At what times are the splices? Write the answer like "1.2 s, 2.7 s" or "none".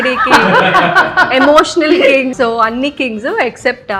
2.3 s